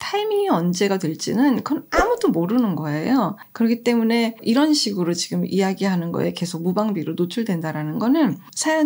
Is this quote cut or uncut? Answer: cut